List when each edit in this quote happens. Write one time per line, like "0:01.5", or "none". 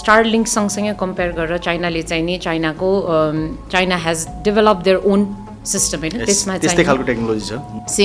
none